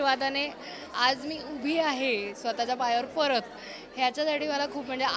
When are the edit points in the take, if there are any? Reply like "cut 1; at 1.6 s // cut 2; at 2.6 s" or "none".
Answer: none